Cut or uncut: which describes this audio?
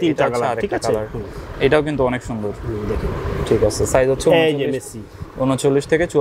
uncut